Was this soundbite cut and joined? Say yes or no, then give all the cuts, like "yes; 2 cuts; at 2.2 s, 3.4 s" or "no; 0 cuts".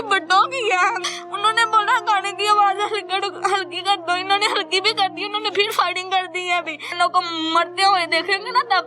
yes; 2 cuts; at 1.1 s, 6.9 s